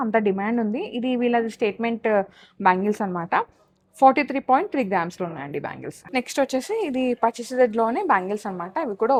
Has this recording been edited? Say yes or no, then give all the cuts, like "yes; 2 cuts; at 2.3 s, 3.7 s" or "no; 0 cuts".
no; 0 cuts